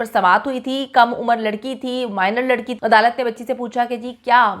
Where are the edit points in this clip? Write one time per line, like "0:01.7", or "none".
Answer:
0:02.7